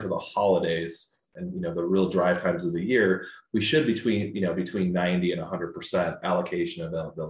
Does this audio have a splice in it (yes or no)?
yes